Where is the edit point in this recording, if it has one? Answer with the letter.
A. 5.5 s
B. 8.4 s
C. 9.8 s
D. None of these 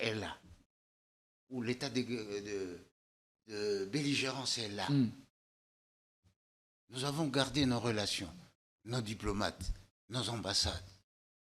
D